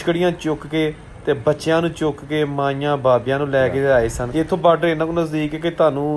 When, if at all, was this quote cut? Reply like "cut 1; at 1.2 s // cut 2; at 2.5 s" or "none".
cut 1; at 4.2 s